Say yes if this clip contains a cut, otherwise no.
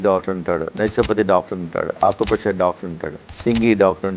yes